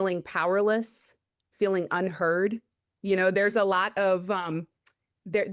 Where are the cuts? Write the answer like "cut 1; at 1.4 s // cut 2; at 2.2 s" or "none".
none